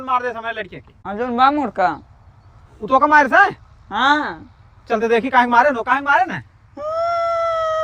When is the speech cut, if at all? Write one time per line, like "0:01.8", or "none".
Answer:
0:01.1